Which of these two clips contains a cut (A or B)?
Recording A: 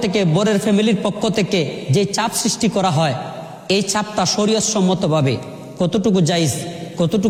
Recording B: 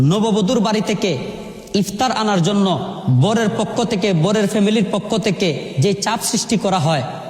B